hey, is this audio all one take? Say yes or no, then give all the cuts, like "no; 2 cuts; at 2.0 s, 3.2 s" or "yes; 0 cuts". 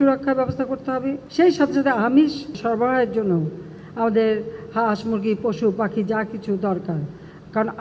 no; 2 cuts; at 1.2 s, 2.6 s